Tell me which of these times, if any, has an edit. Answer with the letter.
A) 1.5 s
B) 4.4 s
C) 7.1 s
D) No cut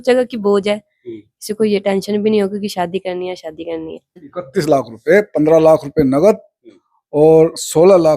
B